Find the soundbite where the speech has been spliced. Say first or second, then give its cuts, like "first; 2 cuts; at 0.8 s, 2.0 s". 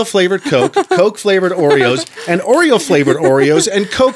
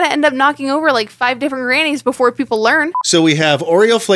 second; 1 cut; at 3.0 s